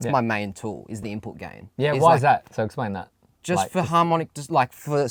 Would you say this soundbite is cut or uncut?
uncut